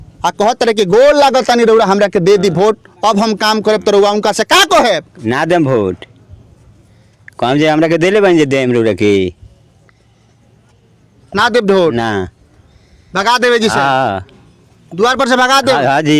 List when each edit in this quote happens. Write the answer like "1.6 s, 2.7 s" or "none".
none

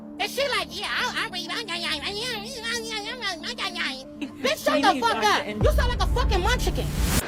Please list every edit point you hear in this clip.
none

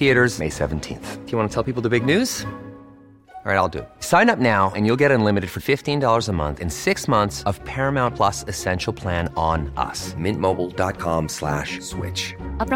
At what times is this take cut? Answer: none

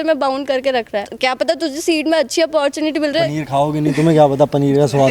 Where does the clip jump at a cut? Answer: 1.1 s, 3.3 s

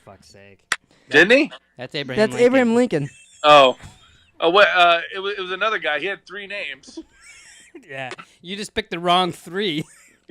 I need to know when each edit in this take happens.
0.9 s

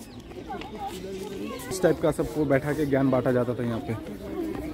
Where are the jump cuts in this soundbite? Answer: 1.8 s

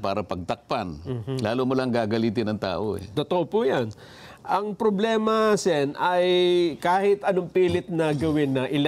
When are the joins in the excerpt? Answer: none

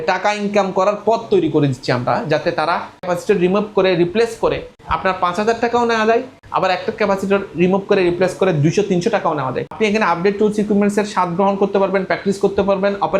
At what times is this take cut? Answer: 3.1 s, 9.7 s

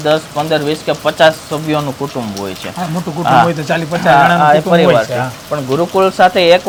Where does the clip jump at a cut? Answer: none

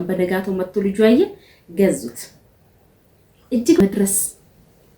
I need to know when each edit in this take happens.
3.8 s

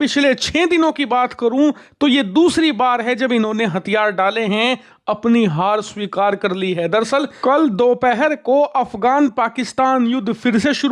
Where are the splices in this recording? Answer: none

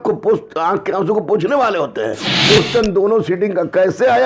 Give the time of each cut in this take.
2.3 s

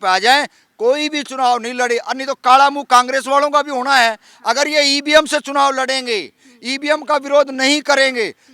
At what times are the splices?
none

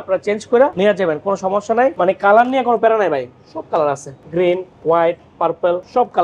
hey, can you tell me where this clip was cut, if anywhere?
1.9 s

